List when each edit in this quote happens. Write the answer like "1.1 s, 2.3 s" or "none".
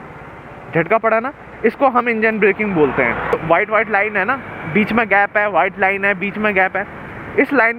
3.3 s